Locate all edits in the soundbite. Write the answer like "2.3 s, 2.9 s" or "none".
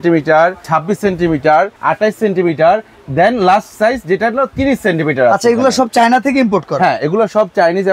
none